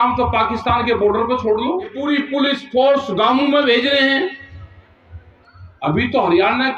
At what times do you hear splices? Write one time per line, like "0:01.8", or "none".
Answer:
0:02.0